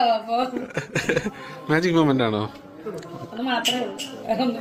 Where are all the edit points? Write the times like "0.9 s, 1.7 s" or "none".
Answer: none

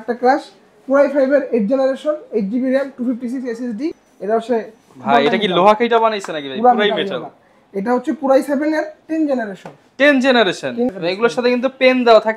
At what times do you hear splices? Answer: 3.9 s, 10.9 s

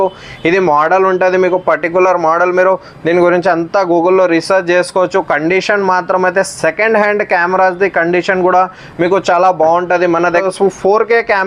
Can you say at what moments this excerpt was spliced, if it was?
10.4 s

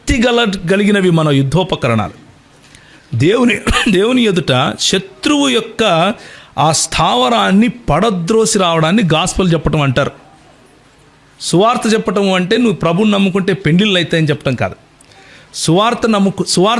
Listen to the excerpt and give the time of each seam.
none

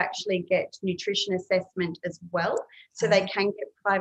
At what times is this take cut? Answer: none

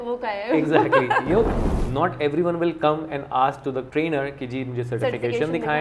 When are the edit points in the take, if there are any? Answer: 1.6 s, 3.9 s

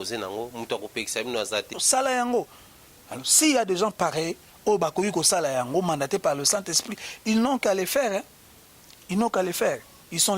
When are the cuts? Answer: 1.8 s

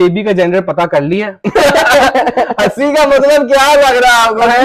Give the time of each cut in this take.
none

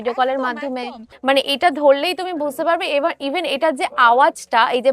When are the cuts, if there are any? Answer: 1.1 s

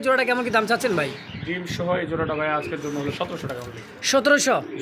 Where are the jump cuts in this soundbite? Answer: none

